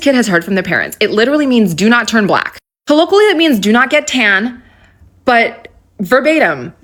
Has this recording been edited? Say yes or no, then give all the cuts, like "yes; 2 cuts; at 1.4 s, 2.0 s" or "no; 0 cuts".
no; 0 cuts